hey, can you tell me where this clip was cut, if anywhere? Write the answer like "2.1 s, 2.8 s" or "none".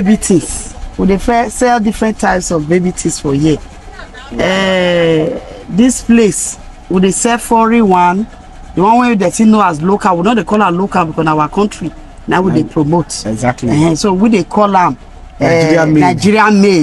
none